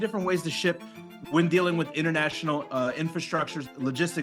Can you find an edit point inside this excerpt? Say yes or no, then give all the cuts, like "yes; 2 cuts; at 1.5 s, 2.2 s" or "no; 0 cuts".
no; 0 cuts